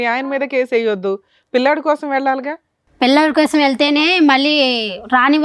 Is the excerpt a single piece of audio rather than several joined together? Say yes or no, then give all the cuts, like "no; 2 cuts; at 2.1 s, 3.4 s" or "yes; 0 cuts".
yes; 0 cuts